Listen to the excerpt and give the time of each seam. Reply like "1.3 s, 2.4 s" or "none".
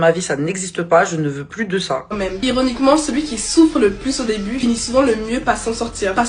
2.1 s